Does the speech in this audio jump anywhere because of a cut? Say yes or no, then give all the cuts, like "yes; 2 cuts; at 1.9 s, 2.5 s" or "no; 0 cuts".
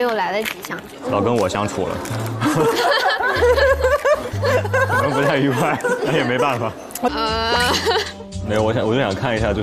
yes; 1 cut; at 7.1 s